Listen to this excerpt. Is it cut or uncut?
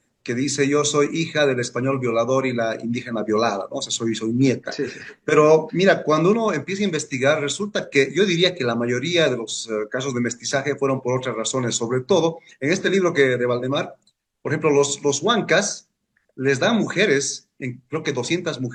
uncut